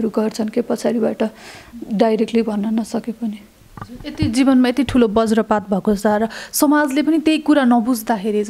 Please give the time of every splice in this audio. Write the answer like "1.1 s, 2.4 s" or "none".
none